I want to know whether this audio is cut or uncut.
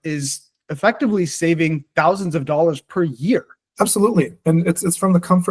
cut